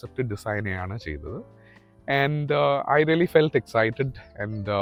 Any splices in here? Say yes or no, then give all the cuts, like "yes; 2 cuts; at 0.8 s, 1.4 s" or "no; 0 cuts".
no; 0 cuts